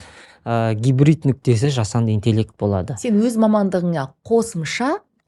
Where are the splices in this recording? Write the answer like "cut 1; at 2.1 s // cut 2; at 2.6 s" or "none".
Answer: none